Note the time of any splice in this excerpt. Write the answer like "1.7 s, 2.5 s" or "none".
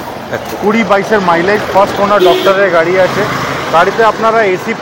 none

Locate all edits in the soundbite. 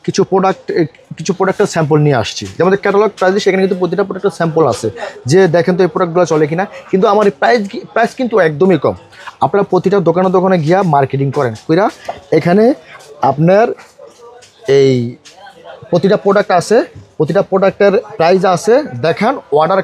none

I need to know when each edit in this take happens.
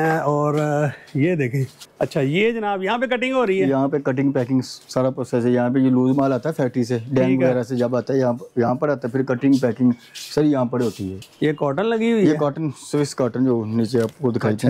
1.8 s, 11.1 s

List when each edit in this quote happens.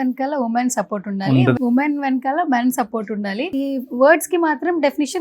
1.6 s, 3.5 s

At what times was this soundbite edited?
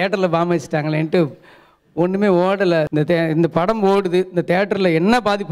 2.9 s

